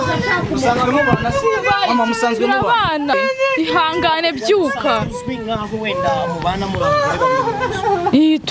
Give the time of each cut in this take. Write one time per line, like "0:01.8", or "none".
0:03.1